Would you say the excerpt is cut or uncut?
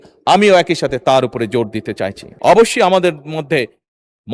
cut